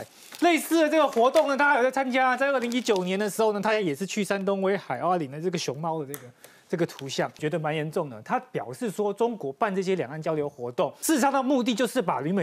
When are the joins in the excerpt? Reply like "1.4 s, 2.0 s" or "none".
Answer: 7.4 s, 11.0 s